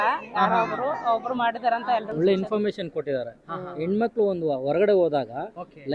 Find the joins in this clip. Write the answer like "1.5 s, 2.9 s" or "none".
2.1 s